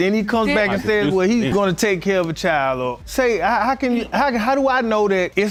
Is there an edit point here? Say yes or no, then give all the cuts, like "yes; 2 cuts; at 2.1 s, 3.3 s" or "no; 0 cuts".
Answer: no; 0 cuts